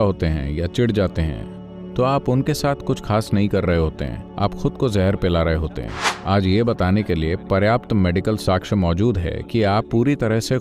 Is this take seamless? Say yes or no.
yes